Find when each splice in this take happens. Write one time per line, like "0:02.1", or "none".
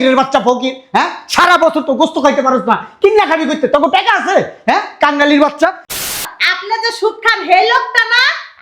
0:06.0